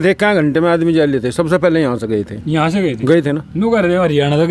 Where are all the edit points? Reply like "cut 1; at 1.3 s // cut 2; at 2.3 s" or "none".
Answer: none